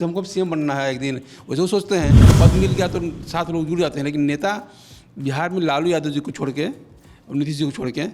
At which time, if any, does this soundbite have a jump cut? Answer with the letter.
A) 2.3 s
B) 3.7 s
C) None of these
A